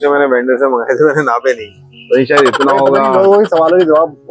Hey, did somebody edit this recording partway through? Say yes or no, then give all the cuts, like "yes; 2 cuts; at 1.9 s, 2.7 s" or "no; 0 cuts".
no; 0 cuts